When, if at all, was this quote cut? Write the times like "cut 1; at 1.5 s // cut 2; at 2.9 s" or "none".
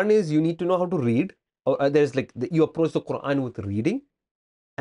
none